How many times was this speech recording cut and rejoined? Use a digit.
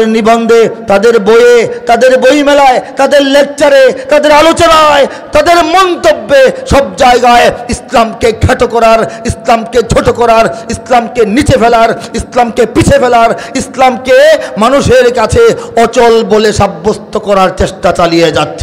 0